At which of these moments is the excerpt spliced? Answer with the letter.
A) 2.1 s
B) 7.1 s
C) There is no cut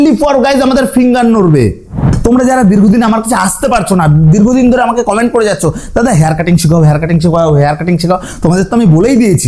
A